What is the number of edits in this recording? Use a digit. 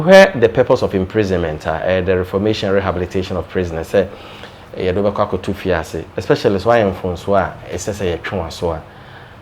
0